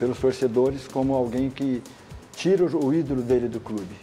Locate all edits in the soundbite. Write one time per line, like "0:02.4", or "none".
none